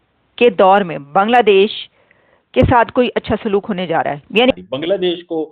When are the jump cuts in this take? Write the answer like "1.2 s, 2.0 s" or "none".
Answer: 4.5 s